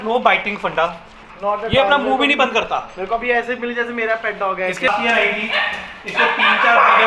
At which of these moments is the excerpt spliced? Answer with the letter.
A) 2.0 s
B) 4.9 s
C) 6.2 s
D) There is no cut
B